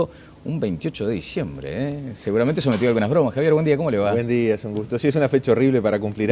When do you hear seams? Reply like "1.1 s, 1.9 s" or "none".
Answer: none